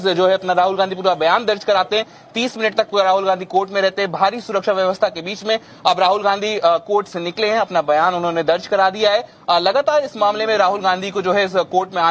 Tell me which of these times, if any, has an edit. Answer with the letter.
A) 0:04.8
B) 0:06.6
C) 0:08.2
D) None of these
D